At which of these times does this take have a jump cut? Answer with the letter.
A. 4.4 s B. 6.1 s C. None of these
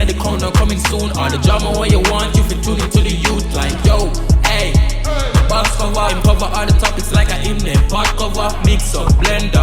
C